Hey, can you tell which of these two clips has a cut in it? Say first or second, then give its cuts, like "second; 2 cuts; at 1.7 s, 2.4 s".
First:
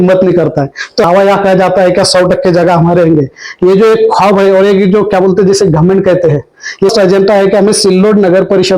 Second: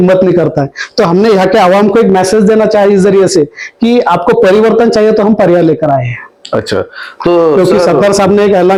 first; 2 cuts; at 1.1 s, 6.9 s